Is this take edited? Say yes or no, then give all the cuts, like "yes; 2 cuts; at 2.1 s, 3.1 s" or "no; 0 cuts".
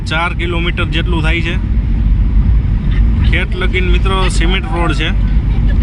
no; 0 cuts